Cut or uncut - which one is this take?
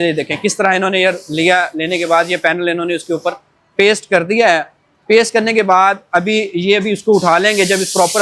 uncut